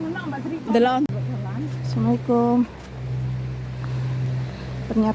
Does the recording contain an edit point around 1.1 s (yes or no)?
yes